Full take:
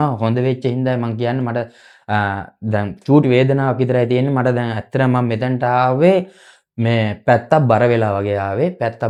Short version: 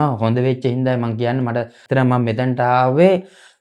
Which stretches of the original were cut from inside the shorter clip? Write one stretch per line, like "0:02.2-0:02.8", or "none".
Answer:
0:01.8-0:04.8